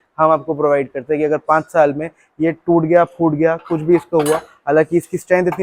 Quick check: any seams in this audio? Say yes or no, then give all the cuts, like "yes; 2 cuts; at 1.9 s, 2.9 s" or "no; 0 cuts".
no; 0 cuts